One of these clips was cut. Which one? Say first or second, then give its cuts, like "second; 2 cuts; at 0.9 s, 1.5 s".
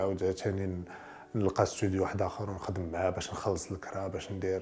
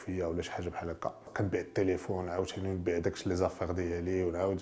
second; 1 cut; at 1.3 s